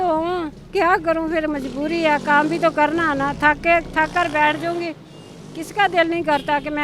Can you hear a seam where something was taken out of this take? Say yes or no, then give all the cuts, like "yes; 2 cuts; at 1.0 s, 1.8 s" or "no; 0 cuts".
no; 0 cuts